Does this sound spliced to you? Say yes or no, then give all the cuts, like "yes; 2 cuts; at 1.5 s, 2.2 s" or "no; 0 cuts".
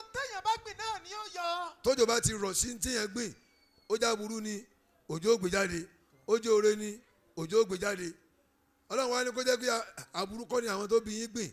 no; 0 cuts